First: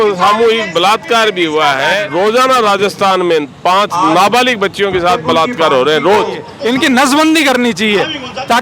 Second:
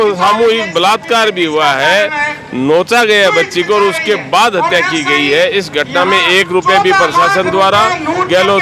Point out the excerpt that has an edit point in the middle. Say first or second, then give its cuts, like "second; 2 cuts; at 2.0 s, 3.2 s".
first; 2 cuts; at 2.1 s, 6.5 s